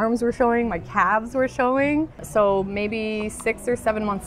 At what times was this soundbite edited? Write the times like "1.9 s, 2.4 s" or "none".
none